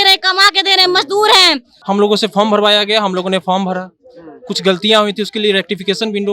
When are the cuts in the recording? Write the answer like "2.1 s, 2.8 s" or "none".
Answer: 1.7 s